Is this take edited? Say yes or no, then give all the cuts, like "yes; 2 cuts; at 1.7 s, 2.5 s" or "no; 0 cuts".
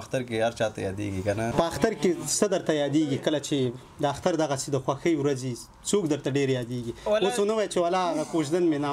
yes; 1 cut; at 1.5 s